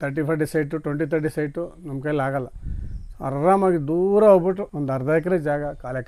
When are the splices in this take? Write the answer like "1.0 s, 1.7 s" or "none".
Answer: 4.7 s